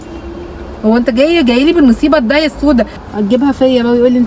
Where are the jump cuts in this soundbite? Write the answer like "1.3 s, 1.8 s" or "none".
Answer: 3.0 s